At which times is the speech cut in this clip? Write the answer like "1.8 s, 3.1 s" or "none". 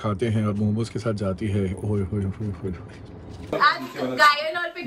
3.5 s